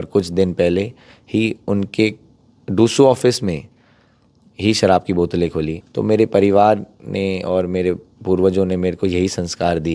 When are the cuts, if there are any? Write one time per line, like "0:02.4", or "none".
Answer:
0:05.8